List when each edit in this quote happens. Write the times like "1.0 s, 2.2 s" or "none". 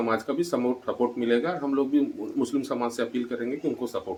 none